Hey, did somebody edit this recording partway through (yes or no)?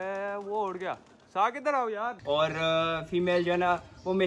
yes